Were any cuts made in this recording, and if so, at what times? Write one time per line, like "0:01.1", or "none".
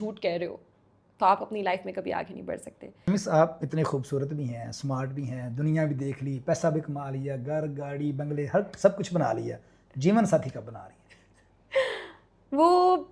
0:03.1